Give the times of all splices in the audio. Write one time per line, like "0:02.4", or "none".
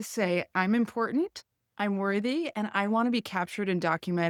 none